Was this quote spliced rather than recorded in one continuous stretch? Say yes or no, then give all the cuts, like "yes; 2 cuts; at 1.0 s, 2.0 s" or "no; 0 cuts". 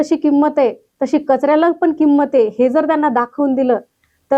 no; 0 cuts